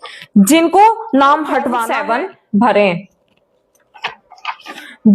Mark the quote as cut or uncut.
cut